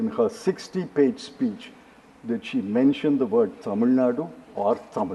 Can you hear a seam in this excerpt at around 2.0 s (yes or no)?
no